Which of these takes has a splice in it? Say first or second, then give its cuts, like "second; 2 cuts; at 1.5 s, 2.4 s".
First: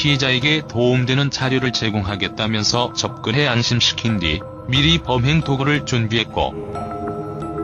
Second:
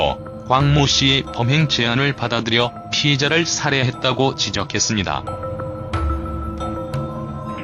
first; 1 cut; at 2.1 s